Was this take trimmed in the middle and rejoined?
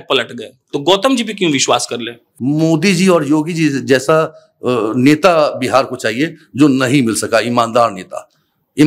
yes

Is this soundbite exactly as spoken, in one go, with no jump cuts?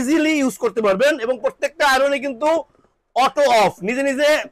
yes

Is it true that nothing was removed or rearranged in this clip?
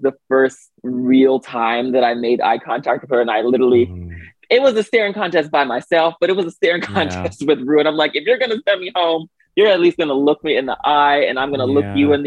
yes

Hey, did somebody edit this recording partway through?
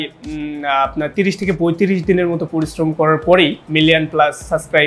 yes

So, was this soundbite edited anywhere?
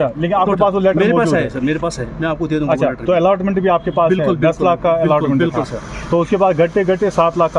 no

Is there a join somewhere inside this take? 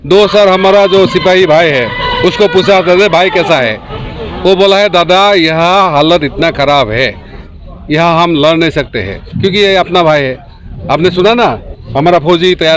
no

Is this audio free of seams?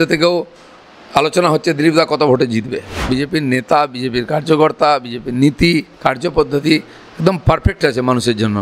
no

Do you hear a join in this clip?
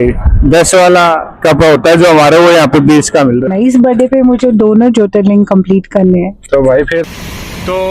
yes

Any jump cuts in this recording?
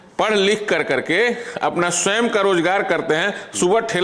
no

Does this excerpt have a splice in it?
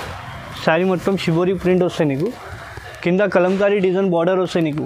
no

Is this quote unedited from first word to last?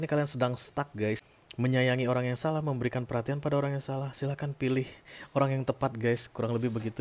no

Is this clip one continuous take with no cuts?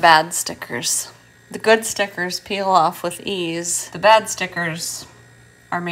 no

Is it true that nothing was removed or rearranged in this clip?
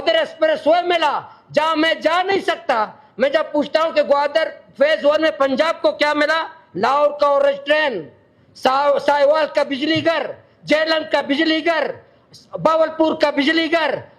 yes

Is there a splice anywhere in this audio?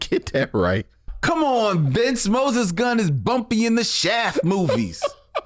yes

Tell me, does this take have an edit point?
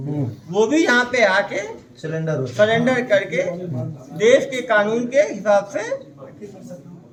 no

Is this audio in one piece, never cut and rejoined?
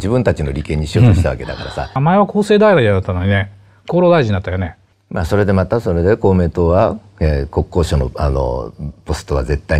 no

